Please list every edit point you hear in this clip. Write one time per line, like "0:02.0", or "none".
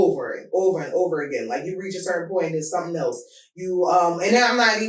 none